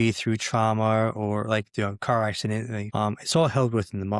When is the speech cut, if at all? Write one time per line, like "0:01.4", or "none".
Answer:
0:02.8